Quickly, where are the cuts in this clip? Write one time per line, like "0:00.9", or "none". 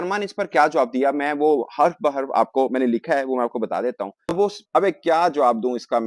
0:04.6